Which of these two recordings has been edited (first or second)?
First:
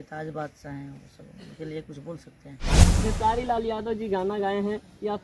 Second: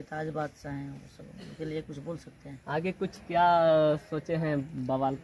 first